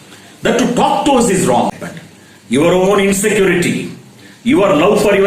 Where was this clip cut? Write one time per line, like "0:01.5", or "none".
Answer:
0:01.9